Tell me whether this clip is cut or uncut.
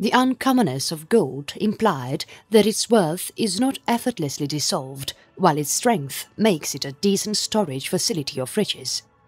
uncut